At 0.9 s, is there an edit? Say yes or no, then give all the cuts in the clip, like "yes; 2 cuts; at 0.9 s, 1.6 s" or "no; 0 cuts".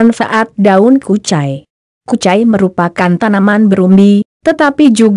yes; 1 cut; at 0.9 s